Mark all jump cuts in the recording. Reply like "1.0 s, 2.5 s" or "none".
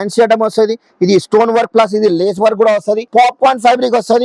3.1 s